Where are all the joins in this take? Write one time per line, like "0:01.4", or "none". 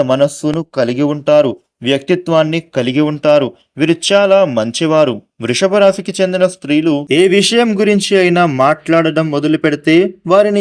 0:07.0